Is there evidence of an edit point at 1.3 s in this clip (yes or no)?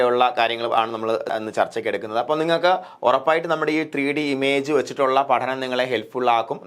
yes